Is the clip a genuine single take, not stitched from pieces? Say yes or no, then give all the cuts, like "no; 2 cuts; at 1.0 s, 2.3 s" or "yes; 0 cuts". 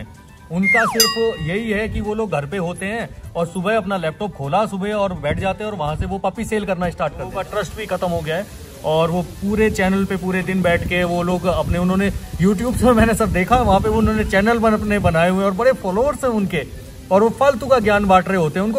no; 1 cut; at 7.3 s